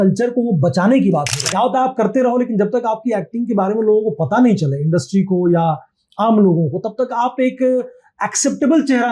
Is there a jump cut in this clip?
yes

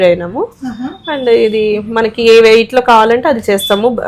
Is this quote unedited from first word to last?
yes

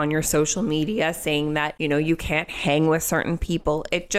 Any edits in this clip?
yes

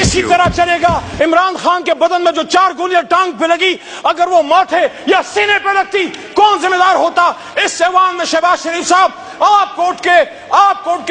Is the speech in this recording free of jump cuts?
no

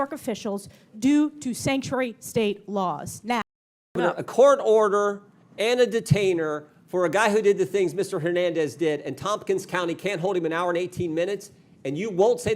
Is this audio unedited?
no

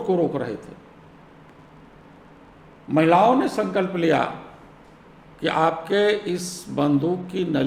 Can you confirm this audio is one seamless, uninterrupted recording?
yes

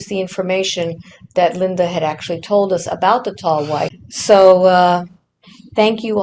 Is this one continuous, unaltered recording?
no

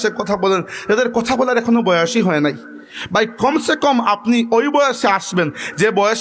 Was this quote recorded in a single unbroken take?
yes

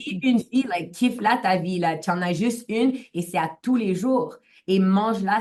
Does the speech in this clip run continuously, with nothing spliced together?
yes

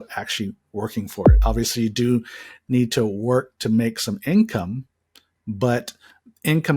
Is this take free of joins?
no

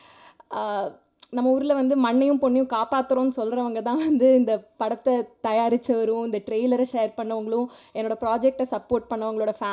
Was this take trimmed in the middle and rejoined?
no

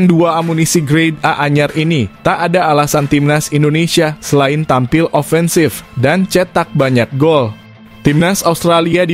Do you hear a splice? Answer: no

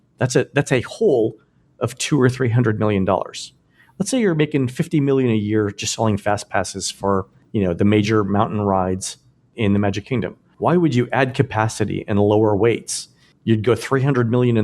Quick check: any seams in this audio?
no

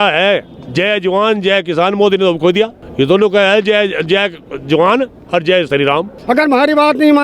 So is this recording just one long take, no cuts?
no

